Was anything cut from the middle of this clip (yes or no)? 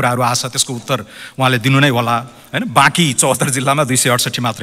no